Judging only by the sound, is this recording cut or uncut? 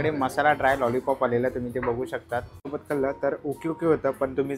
cut